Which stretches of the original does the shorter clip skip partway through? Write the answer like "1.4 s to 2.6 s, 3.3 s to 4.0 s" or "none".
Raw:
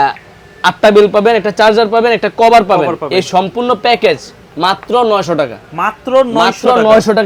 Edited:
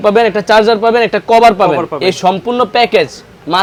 none